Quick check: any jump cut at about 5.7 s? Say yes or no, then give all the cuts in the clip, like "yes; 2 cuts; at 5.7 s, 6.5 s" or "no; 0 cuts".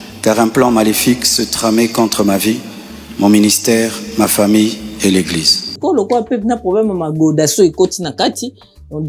yes; 1 cut; at 5.7 s